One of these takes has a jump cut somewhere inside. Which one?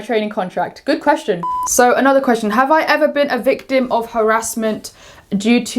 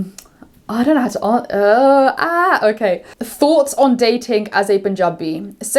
first; 1 cut; at 1.5 s

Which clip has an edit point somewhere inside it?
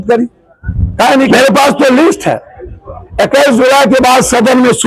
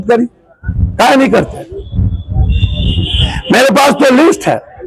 first; 1 cut; at 1.3 s

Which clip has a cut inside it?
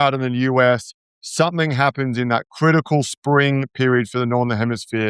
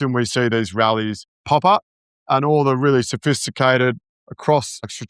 second; 1 cut; at 1.3 s

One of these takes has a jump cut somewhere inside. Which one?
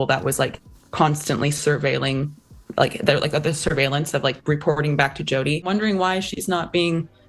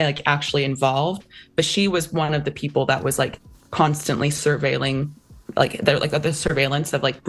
first; 1 cut; at 5.7 s

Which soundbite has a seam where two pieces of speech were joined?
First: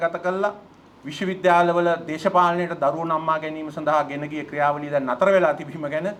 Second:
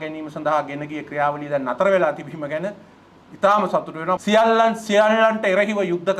second; 1 cut; at 4.2 s

